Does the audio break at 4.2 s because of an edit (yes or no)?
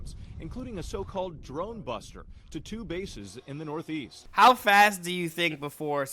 yes